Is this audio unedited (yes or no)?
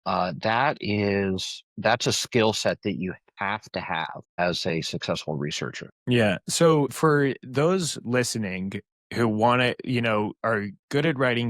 no